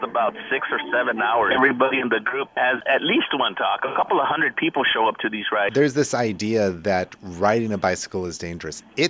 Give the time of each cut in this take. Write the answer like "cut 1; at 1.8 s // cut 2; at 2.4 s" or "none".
cut 1; at 1.5 s // cut 2; at 2.8 s // cut 3; at 3.9 s // cut 4; at 5.7 s